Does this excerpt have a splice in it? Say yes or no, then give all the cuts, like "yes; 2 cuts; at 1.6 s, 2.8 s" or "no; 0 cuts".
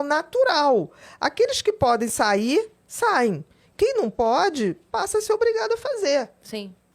no; 0 cuts